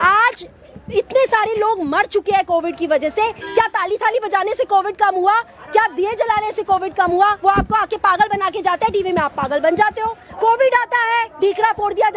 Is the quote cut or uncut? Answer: cut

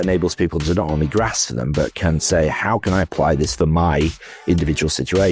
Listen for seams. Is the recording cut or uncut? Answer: uncut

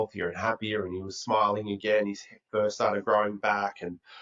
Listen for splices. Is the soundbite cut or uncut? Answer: uncut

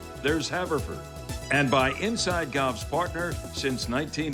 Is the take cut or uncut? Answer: uncut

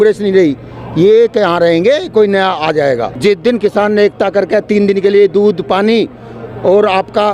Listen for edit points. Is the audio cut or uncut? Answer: cut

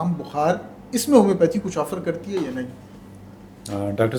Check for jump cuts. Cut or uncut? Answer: uncut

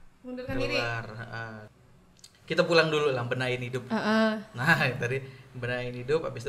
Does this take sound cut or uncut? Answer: cut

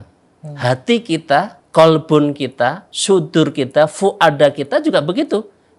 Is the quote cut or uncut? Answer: cut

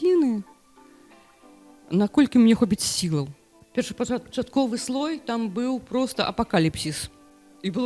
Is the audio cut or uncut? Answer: cut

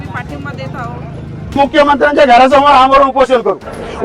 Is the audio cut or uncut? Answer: cut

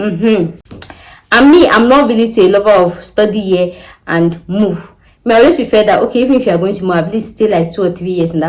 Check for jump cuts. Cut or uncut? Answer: uncut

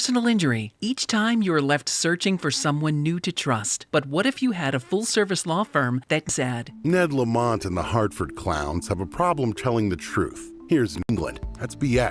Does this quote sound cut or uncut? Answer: cut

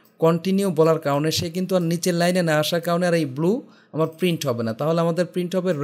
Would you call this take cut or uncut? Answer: uncut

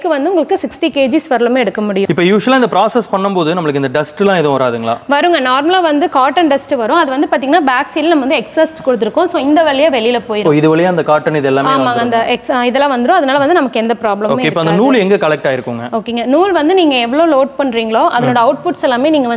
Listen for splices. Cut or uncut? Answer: uncut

